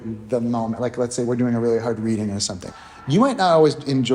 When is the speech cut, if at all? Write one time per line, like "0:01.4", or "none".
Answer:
0:02.6